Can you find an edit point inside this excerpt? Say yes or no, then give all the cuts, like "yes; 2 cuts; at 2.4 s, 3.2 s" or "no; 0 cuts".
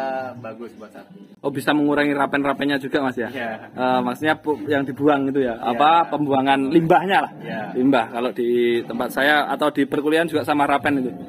no; 0 cuts